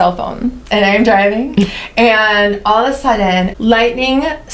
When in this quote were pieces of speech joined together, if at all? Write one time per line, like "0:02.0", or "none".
0:03.5